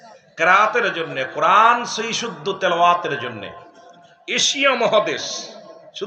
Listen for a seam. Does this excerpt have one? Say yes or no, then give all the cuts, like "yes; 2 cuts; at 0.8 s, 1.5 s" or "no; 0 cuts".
no; 0 cuts